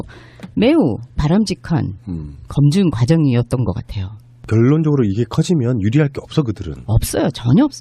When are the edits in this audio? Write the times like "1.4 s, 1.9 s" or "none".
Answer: none